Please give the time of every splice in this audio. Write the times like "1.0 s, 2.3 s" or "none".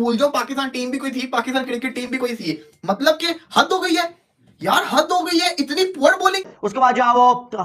6.5 s